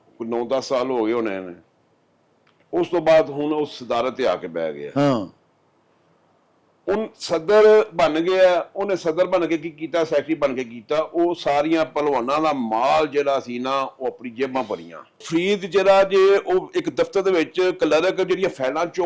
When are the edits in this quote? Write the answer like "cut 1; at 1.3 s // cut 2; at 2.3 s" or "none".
cut 1; at 15.2 s